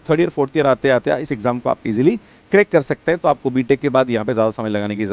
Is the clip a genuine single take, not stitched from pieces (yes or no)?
yes